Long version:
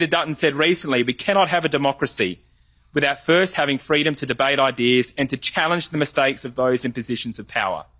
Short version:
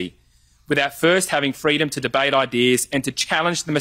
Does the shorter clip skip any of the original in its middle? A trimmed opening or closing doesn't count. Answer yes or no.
no